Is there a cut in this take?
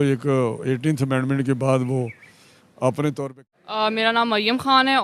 yes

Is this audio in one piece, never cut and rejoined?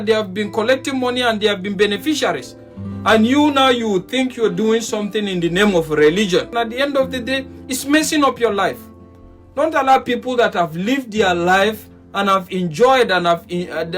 no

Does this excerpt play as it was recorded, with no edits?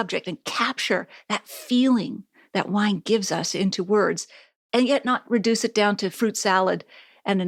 yes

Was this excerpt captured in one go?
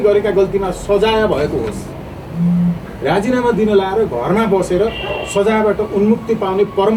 yes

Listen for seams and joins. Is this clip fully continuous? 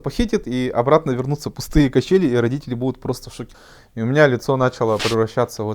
no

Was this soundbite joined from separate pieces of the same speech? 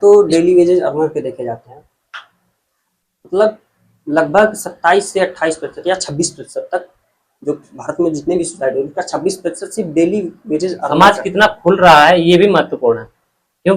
yes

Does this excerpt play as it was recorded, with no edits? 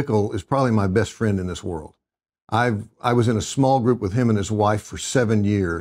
yes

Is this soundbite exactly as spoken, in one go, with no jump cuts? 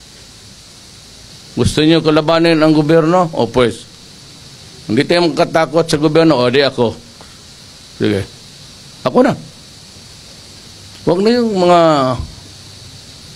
no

